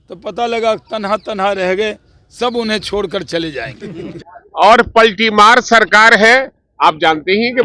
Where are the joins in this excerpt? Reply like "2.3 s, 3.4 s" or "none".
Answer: 4.3 s